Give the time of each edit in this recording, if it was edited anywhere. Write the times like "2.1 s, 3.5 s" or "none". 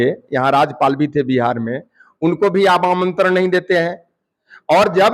none